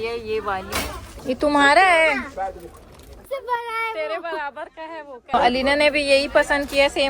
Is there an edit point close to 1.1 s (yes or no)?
yes